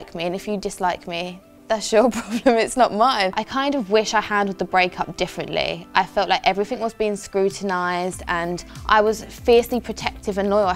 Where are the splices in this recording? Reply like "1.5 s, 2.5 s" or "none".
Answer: 3.4 s